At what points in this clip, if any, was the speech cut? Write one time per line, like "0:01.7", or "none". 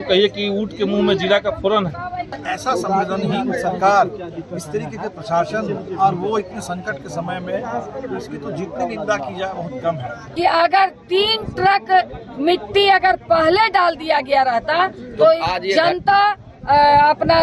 0:02.4
0:10.2